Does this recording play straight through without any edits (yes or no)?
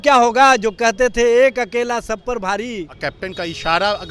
no